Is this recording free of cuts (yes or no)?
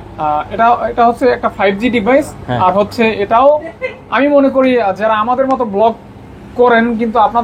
yes